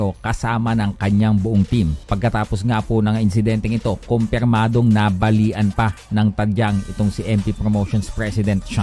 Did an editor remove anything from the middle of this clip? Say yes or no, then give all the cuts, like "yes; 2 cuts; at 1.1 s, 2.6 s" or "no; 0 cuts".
yes; 2 cuts; at 2.0 s, 3.0 s